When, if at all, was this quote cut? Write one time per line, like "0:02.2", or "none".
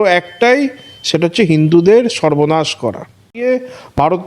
0:03.3

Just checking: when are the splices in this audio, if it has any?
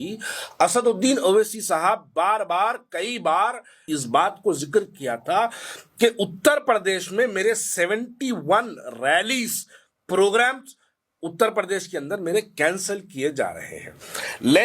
0:03.9

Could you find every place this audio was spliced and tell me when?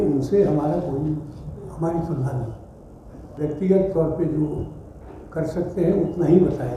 none

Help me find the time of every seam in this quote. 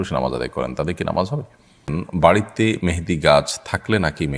0:02.0

